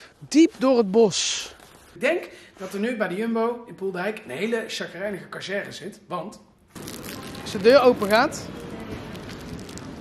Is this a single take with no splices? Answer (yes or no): no